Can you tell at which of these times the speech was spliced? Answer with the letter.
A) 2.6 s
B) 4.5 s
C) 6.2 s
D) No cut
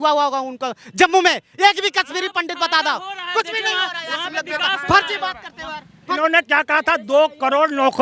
C